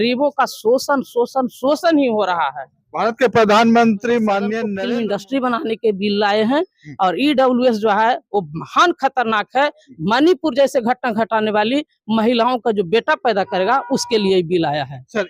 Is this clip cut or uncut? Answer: cut